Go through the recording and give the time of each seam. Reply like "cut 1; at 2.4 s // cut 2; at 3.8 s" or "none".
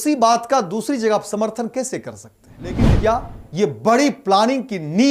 cut 1; at 2.8 s